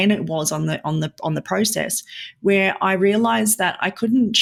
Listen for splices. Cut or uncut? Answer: uncut